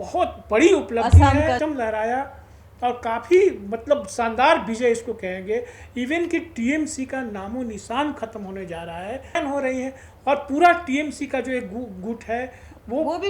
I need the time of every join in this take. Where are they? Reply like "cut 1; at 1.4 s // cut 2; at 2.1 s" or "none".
cut 1; at 1.6 s // cut 2; at 9.4 s